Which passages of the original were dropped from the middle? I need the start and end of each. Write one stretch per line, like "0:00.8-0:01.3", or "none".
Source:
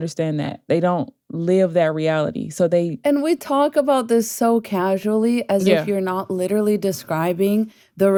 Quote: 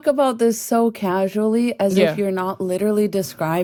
none